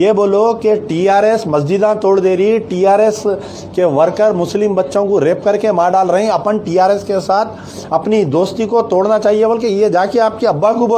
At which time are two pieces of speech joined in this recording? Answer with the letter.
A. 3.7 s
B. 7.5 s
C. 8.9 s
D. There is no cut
D